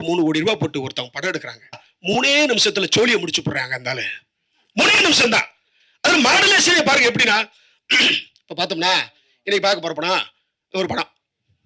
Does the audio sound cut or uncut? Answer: cut